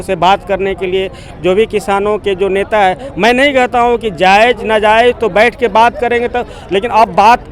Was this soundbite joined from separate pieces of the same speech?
no; 0 cuts

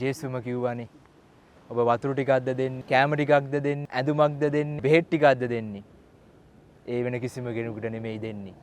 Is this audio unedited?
no; 3 cuts; at 2.8 s, 3.9 s, 4.7 s

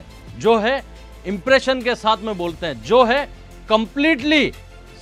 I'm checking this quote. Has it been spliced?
no; 0 cuts

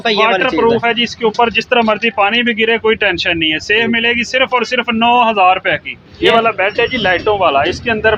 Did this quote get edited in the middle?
yes; 1 cut; at 6.3 s

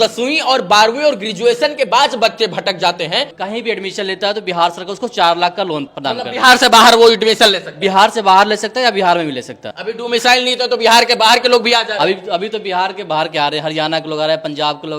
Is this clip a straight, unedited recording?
no; 3 cuts; at 3.3 s, 5.9 s, 9.7 s

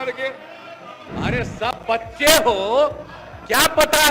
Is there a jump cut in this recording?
yes; 1 cut; at 1.0 s

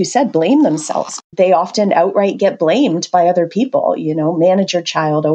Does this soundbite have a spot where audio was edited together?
yes; 1 cut; at 1.2 s

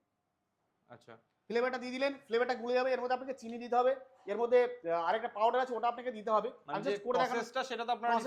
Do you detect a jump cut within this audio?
no; 0 cuts

